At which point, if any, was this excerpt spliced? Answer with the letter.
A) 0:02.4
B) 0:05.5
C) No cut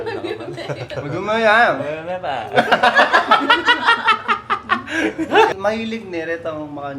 B